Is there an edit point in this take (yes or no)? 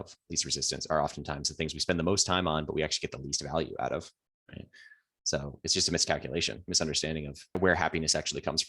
yes